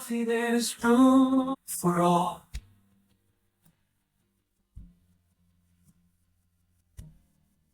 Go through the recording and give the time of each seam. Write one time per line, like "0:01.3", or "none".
0:01.6